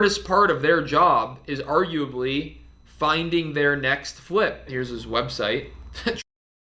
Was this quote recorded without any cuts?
yes; 0 cuts

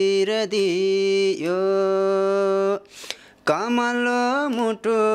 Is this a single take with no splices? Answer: yes; 0 cuts

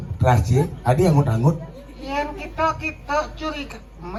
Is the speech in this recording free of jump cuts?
yes; 0 cuts

